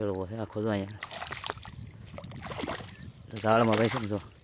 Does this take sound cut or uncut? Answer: uncut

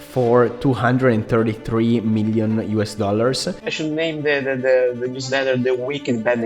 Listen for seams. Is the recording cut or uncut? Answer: cut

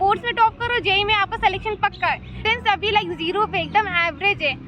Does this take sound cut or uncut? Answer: cut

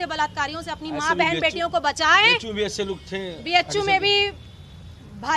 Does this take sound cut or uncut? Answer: uncut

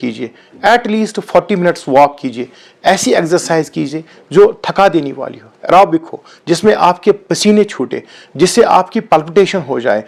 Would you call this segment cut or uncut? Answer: uncut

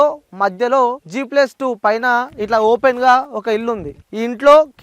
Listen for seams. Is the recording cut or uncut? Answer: cut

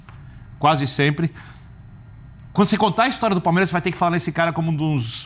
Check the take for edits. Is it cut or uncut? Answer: uncut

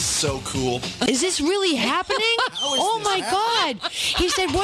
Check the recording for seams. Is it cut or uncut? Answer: cut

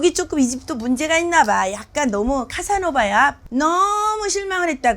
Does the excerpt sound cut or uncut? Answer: cut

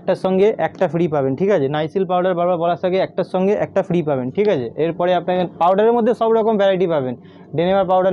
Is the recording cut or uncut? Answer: uncut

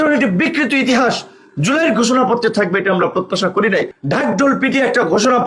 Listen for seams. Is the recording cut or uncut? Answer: cut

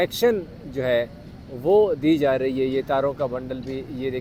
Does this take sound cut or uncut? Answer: uncut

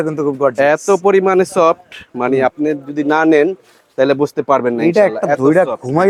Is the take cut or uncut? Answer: uncut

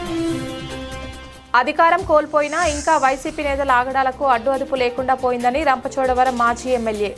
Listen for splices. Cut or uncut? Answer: cut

